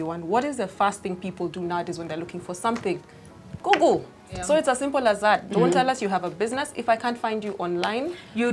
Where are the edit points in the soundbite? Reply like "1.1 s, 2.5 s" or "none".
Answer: 4.3 s